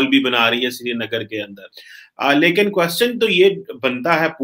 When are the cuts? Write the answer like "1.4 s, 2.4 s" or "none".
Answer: none